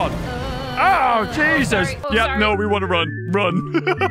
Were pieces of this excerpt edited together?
no; 0 cuts

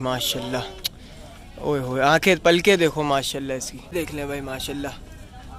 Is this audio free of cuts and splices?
no; 1 cut; at 3.9 s

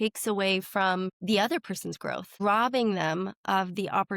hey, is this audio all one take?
no; 2 cuts; at 1.2 s, 2.4 s

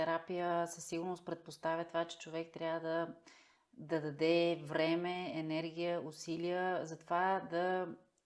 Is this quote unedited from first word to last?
yes; 0 cuts

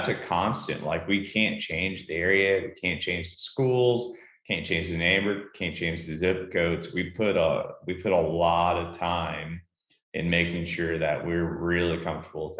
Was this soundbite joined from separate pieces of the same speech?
no; 0 cuts

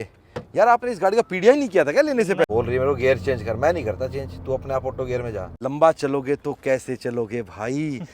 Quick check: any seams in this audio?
yes; 2 cuts; at 2.5 s, 5.5 s

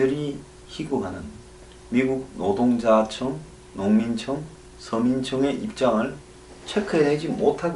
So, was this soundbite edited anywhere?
yes; 1 cut; at 3.9 s

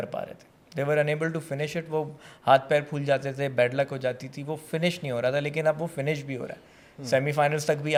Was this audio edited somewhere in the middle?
no; 0 cuts

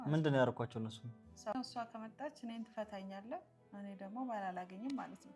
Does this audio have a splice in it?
yes; 1 cut; at 1.5 s

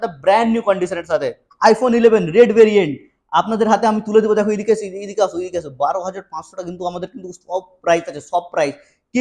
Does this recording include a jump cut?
yes; 1 cut; at 1.4 s

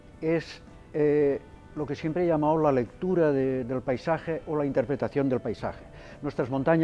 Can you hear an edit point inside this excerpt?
no; 0 cuts

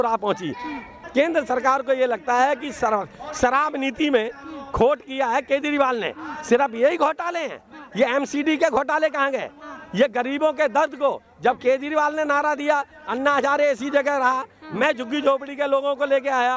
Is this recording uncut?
no; 1 cut; at 0.9 s

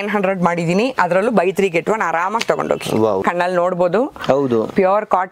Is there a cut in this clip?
yes; 1 cut; at 3.2 s

